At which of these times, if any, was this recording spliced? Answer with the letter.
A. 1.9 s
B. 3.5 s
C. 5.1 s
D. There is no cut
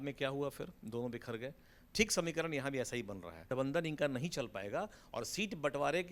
B